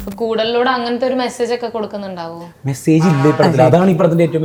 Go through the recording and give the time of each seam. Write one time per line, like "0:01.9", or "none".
none